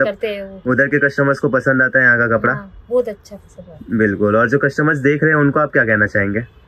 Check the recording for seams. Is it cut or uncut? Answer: uncut